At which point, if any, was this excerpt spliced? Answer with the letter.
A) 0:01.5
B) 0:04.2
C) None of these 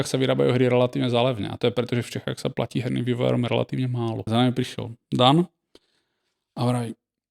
B